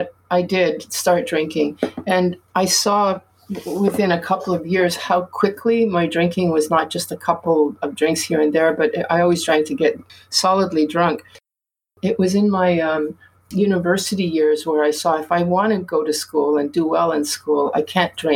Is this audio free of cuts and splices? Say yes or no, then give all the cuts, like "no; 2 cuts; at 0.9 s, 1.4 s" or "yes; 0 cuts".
yes; 0 cuts